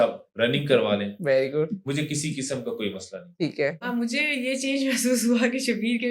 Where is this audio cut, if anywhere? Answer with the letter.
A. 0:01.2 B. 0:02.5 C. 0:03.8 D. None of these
C